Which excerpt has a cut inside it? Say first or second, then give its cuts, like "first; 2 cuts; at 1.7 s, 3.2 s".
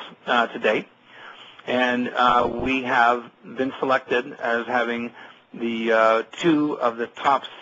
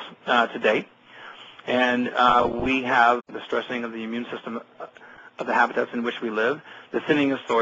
first; 1 cut; at 3.3 s